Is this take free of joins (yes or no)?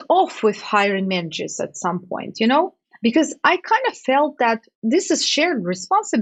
yes